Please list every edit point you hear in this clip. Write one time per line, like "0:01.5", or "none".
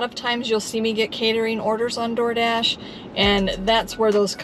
none